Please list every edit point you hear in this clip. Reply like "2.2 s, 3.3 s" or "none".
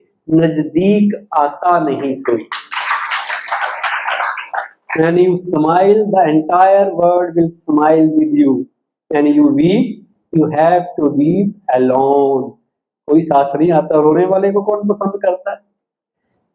none